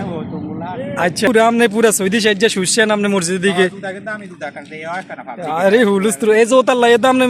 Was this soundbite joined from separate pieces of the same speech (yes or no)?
yes